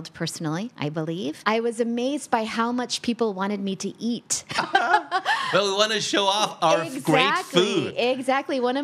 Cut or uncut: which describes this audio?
cut